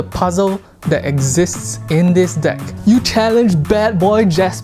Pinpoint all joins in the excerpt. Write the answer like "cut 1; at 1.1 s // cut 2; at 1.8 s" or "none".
cut 1; at 2.7 s